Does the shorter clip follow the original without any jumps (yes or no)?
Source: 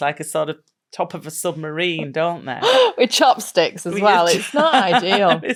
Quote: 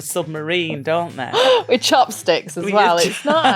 yes